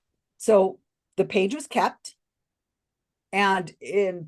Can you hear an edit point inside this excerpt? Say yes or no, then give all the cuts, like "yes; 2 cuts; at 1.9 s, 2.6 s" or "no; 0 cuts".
no; 0 cuts